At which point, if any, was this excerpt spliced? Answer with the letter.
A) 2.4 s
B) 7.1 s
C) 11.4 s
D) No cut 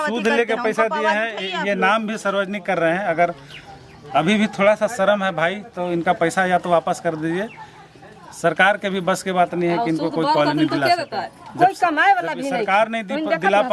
D